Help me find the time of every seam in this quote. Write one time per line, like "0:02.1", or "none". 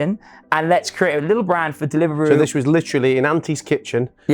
0:02.3